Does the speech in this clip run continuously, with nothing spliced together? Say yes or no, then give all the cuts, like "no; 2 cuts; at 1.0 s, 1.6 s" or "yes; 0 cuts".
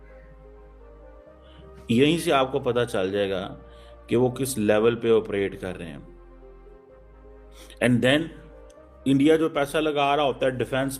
no; 1 cut; at 1.9 s